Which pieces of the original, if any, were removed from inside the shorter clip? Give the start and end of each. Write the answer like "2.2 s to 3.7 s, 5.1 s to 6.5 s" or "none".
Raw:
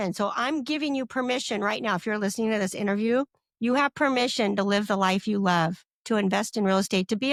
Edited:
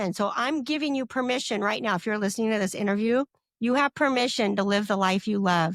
none

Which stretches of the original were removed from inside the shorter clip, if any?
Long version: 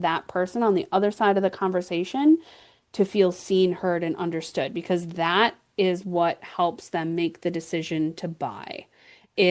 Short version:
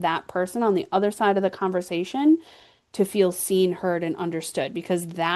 none

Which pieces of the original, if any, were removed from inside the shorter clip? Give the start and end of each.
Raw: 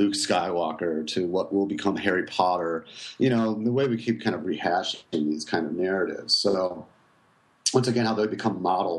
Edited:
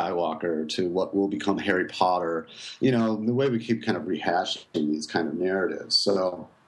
none

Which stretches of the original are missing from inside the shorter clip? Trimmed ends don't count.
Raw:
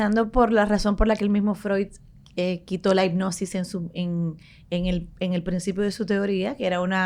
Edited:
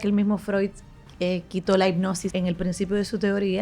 3.4 s to 5.1 s

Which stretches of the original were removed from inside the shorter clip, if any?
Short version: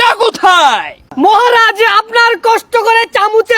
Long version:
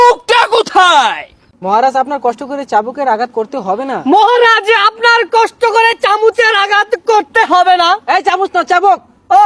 1.4 s to 3.9 s

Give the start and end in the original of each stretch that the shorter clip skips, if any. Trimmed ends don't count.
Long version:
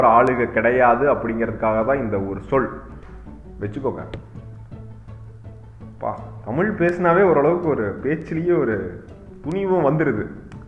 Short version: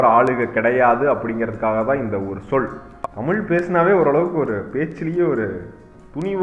3.0 s to 6.3 s

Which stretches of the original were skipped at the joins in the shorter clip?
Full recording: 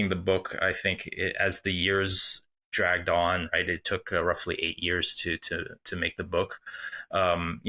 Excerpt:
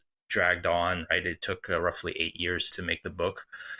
5.1 s to 5.8 s

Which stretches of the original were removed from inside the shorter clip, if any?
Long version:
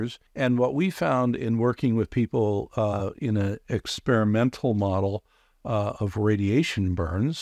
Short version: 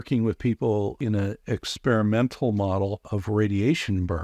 2.7 s to 3.2 s, 5.3 s to 6.0 s

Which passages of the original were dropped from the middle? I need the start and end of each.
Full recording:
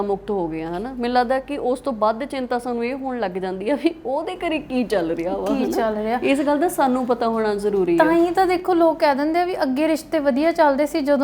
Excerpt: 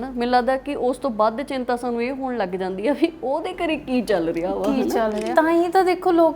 6.1 s to 7.9 s

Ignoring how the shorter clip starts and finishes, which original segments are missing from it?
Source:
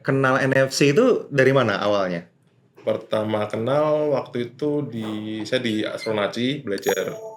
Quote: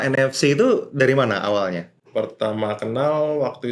2.3 s to 2.6 s

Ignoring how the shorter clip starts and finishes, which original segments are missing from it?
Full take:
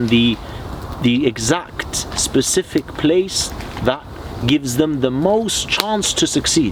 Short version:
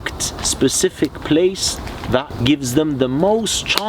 4.1 s to 4.3 s

